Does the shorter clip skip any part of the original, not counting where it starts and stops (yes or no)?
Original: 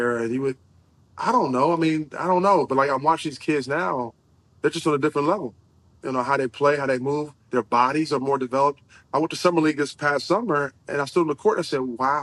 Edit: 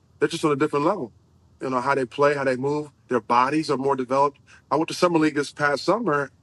no